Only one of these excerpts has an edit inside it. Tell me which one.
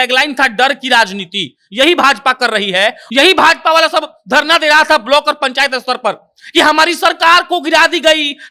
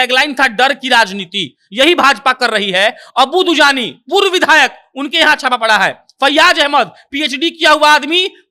first; 1 cut; at 3.0 s

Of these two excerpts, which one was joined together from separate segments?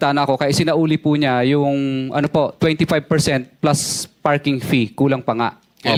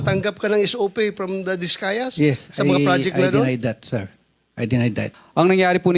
second; 1 cut; at 5.1 s

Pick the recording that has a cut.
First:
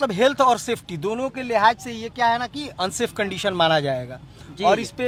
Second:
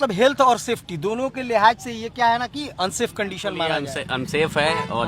second; 1 cut; at 4.0 s

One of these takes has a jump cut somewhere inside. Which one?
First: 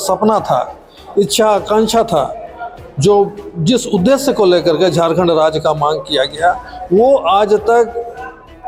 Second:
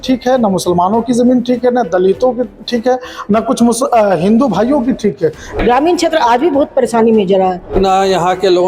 second; 2 cuts; at 5.5 s, 7.7 s

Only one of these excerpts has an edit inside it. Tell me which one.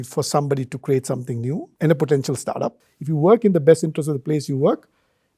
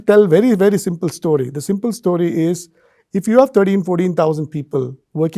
first; 2 cuts; at 1.7 s, 2.8 s

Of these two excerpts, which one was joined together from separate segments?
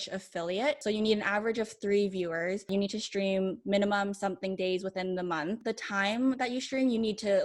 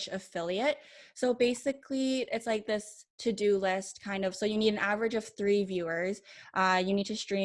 first; 3 cuts; at 0.8 s, 2.7 s, 5.6 s

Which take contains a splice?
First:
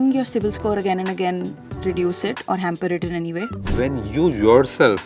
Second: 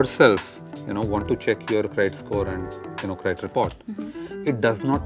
first; 1 cut; at 3.6 s

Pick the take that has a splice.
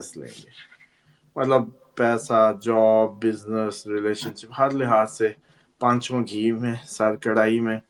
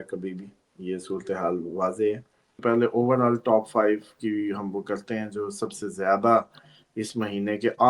second; 1 cut; at 2.5 s

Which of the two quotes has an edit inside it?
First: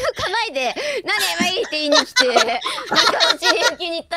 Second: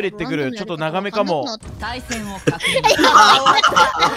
second; 1 cut; at 1.7 s

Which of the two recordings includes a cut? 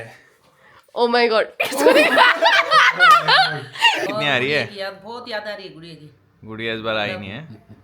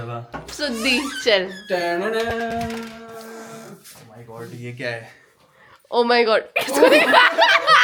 first; 1 cut; at 4.0 s

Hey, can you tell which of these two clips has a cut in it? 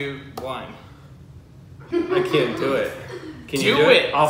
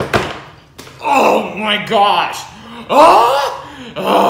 first; 1 cut; at 1.9 s

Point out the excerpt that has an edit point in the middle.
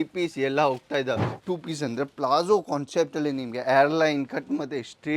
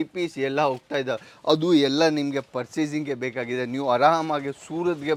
first; 1 cut; at 1.3 s

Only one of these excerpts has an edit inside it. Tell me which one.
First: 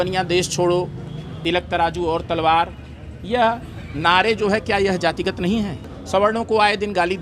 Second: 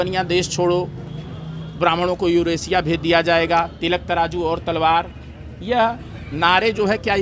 first; 2 cuts; at 1.4 s, 5.8 s

